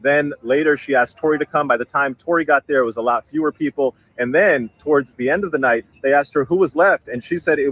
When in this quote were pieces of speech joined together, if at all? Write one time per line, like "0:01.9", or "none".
0:05.9